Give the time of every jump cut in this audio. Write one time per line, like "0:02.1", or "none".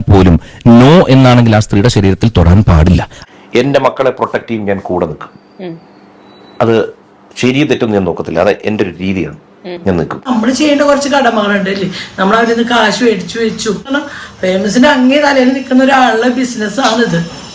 0:03.1
0:10.3
0:14.0